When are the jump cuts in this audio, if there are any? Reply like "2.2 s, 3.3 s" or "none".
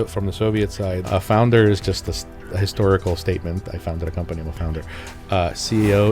1.0 s